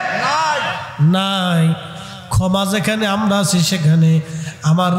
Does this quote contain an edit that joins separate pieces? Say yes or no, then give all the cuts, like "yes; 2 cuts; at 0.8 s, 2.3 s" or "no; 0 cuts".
no; 0 cuts